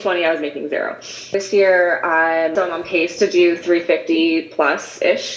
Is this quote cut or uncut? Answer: cut